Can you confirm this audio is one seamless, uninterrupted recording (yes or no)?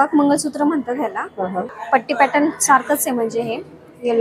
no